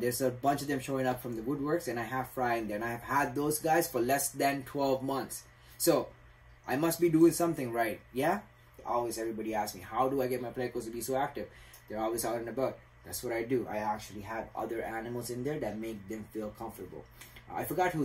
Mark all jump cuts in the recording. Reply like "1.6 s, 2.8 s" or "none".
8.7 s